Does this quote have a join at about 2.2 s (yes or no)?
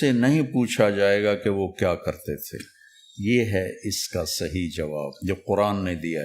no